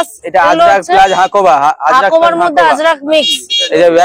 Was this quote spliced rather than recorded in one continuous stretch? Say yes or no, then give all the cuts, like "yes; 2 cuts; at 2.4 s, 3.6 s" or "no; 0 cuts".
no; 0 cuts